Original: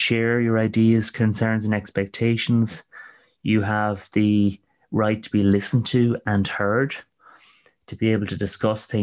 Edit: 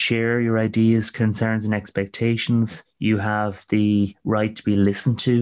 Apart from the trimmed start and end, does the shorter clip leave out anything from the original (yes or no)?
yes